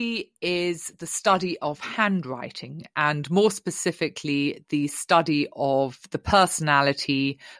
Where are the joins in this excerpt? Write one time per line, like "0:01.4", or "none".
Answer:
none